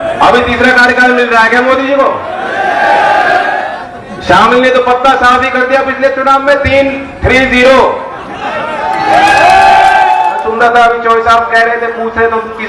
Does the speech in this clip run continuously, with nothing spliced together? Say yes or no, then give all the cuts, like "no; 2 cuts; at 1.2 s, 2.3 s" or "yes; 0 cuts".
no; 2 cuts; at 3.7 s, 10.3 s